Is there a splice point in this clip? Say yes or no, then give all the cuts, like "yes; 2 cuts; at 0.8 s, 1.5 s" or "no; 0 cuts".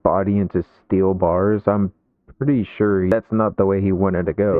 no; 0 cuts